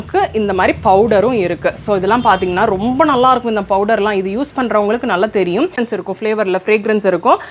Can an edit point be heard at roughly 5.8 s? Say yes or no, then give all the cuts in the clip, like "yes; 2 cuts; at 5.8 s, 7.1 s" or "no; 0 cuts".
yes; 1 cut; at 5.8 s